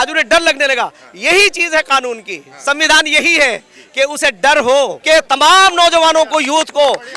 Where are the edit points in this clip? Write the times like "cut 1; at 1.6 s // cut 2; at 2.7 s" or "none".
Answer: cut 1; at 5.0 s